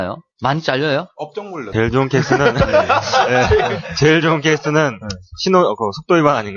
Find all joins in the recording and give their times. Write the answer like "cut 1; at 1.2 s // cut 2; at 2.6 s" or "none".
cut 1; at 1.6 s